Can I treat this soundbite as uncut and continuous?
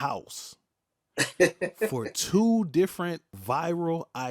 no; 1 cut; at 3.3 s

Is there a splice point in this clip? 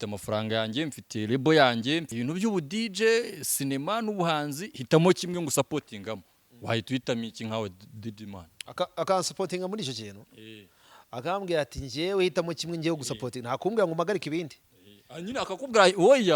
yes; 1 cut; at 2.1 s

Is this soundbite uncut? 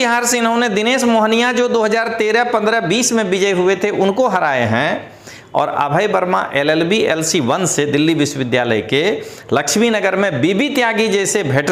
yes; 0 cuts

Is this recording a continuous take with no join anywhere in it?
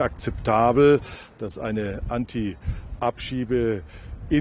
yes; 0 cuts

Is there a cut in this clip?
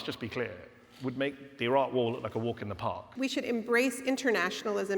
yes; 1 cut; at 3.1 s

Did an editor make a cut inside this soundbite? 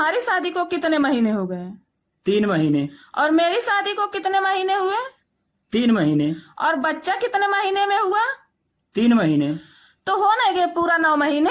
no; 0 cuts

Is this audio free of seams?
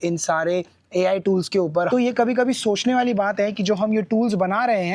no; 1 cut; at 1.9 s

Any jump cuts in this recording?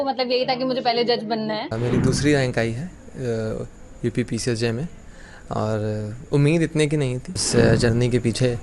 yes; 2 cuts; at 1.7 s, 7.4 s

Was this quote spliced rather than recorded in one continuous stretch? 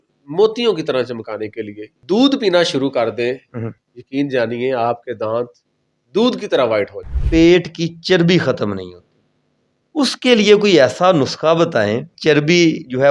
yes; 3 cuts; at 1.9 s, 7.4 s, 12.1 s

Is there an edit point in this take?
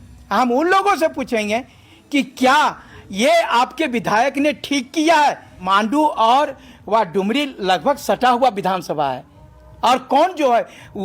yes; 1 cut; at 5.5 s

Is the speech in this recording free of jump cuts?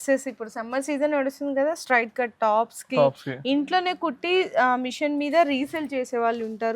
yes; 0 cuts

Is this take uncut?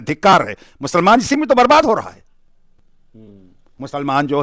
yes; 0 cuts

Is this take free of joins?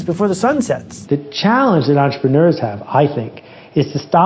no; 1 cut; at 0.9 s

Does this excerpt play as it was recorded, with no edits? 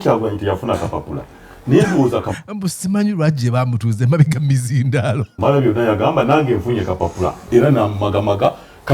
yes; 0 cuts

